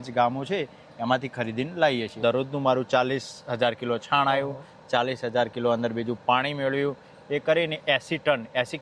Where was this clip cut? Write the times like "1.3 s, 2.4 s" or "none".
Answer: 2.1 s

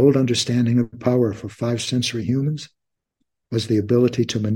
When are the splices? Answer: none

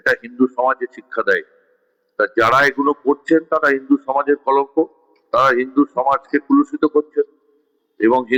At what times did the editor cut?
none

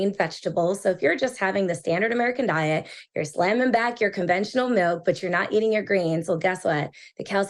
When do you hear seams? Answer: none

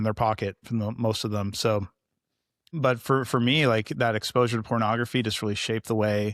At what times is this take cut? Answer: 2.6 s

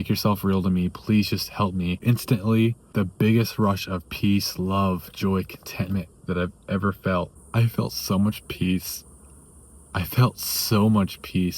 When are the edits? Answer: 2.0 s, 2.8 s, 7.4 s

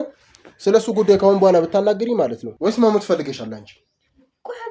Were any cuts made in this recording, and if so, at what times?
2.5 s

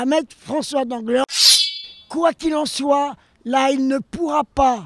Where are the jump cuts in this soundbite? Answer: 1.7 s

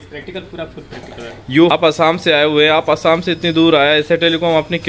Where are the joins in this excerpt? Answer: 1.7 s

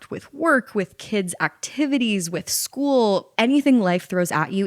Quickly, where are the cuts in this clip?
3.3 s

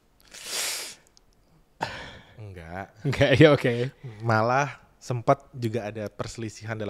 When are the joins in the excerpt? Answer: none

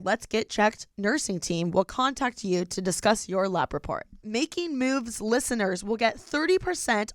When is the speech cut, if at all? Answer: 4.2 s

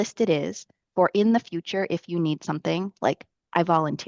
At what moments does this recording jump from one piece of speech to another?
none

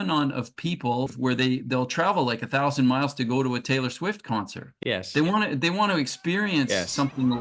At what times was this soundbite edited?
1.1 s, 4.7 s

